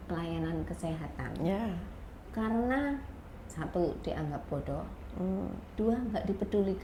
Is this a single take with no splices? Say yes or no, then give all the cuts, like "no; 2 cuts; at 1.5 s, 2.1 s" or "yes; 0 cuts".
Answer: yes; 0 cuts